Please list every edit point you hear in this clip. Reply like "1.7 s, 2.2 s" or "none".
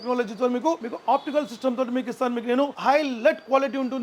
2.8 s